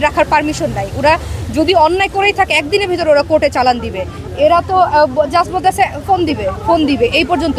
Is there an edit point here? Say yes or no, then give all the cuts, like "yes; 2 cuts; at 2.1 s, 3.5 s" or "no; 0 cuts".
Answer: no; 0 cuts